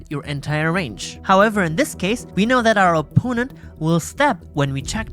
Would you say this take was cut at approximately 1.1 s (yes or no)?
yes